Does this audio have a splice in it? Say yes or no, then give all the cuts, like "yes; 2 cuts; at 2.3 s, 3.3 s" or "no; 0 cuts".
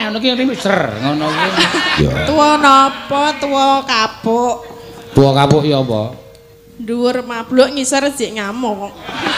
yes; 1 cut; at 1.9 s